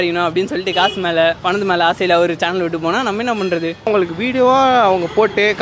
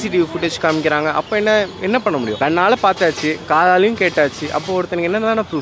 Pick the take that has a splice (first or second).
first